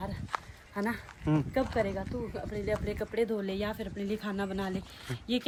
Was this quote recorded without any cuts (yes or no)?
yes